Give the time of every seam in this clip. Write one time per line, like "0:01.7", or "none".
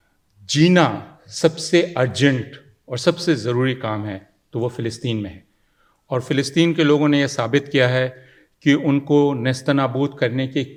none